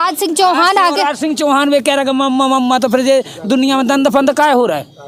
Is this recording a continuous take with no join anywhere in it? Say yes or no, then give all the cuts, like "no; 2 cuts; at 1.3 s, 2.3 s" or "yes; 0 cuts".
yes; 0 cuts